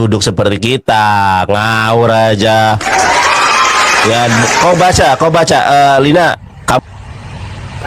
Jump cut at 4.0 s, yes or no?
no